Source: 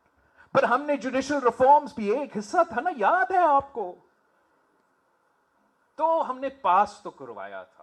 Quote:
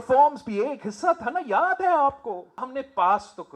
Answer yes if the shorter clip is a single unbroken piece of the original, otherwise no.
no